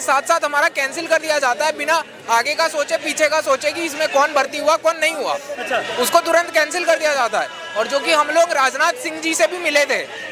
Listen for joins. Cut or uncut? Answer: uncut